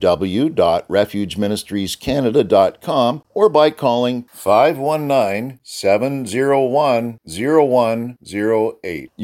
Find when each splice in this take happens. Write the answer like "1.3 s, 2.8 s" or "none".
3.2 s